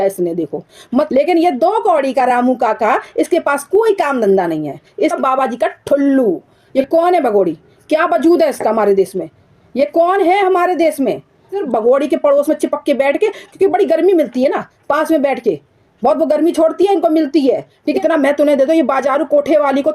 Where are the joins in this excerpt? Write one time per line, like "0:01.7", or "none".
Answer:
0:01.1
0:05.1
0:06.6
0:11.6
0:17.8